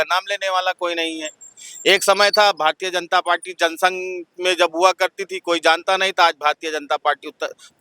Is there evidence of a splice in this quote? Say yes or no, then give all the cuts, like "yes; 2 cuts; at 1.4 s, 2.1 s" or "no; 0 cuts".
no; 0 cuts